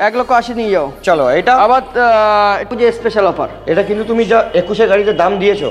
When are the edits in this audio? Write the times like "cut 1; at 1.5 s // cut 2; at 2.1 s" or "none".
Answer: cut 1; at 2.7 s